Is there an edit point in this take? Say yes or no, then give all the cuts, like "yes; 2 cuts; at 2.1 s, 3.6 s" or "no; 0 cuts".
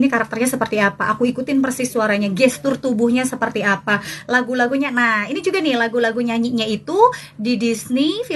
no; 0 cuts